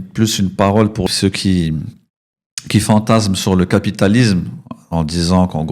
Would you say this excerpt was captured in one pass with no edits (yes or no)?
no